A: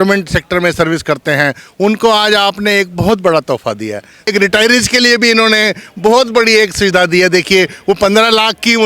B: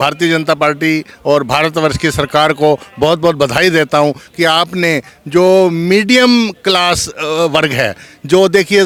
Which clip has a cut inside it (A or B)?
A